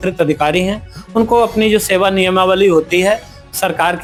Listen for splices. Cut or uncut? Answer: uncut